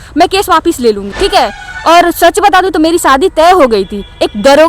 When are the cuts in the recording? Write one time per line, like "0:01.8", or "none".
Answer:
0:01.1